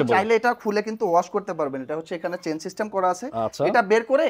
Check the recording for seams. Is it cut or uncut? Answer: uncut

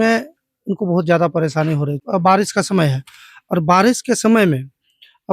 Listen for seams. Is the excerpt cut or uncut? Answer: cut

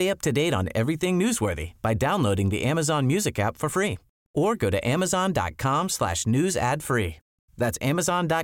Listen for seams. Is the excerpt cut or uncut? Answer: uncut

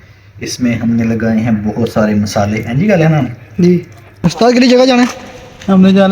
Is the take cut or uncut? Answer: cut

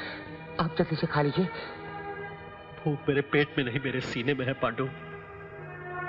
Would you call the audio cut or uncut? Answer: uncut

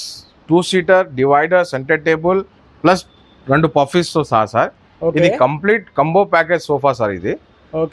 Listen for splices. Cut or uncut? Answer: uncut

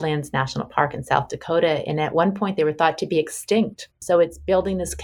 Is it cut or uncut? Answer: cut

